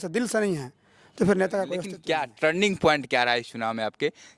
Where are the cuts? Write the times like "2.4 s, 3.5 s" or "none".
1.9 s

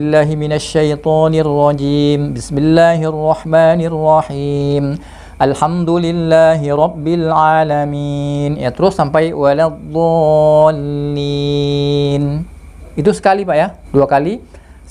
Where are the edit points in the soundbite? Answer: 13.8 s

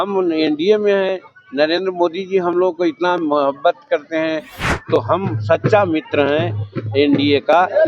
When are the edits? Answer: 4.5 s

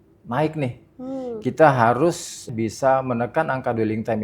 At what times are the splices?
2.4 s

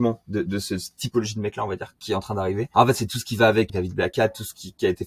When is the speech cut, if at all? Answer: 2.7 s, 3.7 s

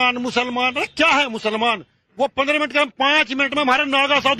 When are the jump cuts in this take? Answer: none

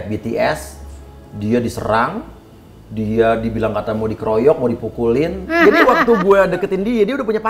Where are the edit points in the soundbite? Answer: 5.5 s

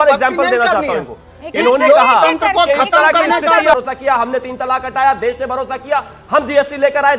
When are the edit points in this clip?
3.7 s

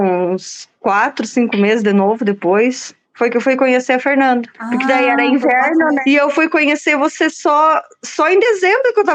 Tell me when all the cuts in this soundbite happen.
none

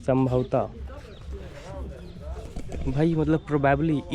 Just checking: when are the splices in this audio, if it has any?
none

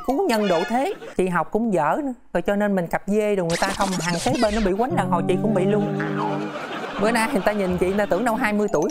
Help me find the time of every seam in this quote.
1.0 s, 6.7 s

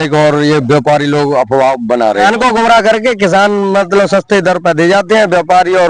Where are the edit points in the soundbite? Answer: 2.2 s

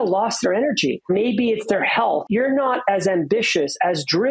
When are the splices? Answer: 1.1 s, 2.2 s

